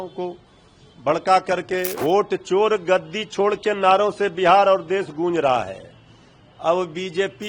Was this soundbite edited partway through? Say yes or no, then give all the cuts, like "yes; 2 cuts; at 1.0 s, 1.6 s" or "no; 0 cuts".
yes; 1 cut; at 1.9 s